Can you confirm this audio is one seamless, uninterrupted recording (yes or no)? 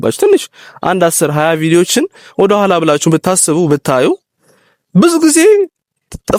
yes